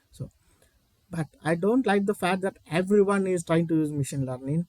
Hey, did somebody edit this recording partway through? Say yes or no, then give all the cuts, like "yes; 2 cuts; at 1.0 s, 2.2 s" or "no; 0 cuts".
no; 0 cuts